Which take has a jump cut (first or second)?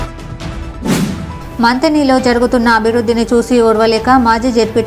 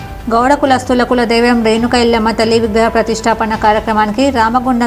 first